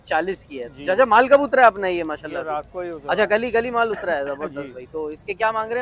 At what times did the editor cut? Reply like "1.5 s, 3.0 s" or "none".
none